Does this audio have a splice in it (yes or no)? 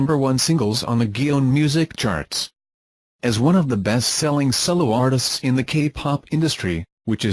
no